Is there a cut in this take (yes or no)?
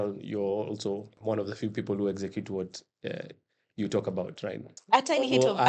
yes